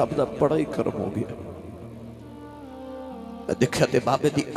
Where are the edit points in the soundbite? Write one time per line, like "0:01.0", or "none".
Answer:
0:01.4
0:03.2